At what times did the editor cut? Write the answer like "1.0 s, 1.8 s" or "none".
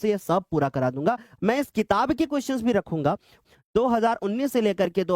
1.3 s, 3.3 s